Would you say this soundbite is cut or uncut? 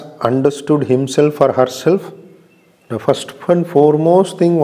uncut